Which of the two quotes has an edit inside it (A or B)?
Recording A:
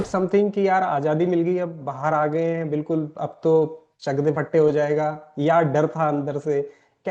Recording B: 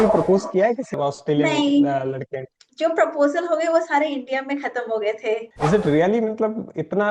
B